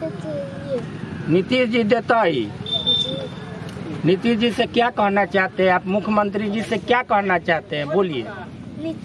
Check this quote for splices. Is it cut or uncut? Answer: uncut